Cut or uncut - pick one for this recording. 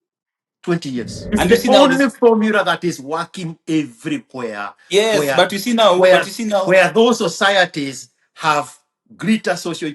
cut